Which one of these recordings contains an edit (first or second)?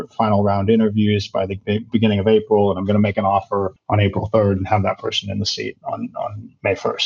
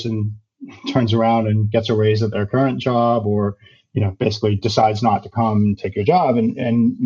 first